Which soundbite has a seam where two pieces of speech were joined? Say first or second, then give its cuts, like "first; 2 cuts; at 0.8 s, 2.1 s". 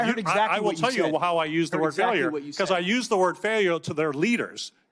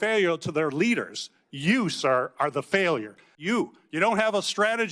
second; 1 cut; at 3.3 s